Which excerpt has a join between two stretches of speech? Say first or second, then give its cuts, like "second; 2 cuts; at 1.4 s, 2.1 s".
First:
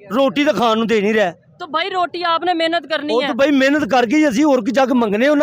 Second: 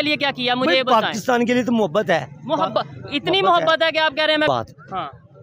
second; 1 cut; at 4.5 s